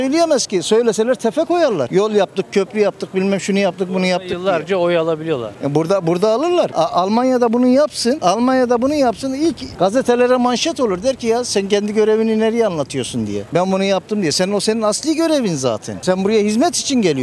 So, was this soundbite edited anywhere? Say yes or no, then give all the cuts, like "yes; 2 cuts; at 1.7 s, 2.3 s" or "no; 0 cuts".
no; 0 cuts